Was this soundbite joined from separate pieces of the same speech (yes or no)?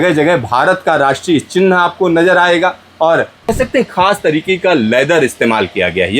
yes